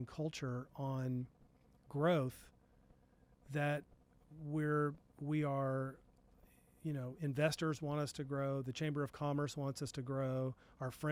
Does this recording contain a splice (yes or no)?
no